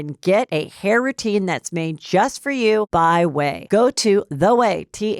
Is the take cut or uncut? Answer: uncut